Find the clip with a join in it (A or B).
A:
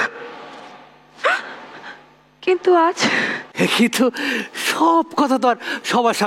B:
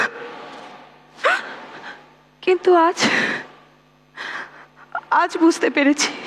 A